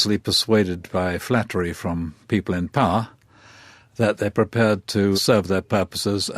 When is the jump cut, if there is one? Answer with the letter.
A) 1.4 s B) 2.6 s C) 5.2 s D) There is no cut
C